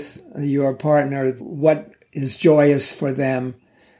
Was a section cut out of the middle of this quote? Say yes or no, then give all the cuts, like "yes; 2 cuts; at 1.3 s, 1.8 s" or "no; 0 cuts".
yes; 1 cut; at 1.4 s